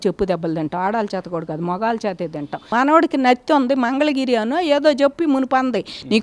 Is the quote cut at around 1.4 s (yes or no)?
no